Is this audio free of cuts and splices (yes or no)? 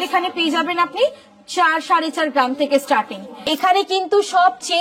no